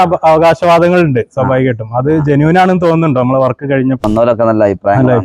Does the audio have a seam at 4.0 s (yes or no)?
yes